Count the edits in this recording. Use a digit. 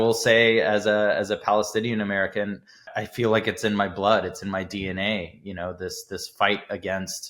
1